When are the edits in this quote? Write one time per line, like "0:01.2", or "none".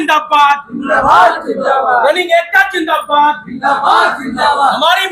none